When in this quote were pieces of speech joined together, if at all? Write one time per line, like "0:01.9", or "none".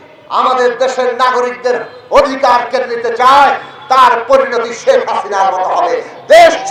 none